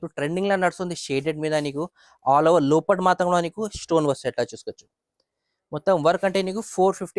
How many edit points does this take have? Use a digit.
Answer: 0